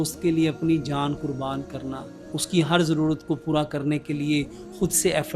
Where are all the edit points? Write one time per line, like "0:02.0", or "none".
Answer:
none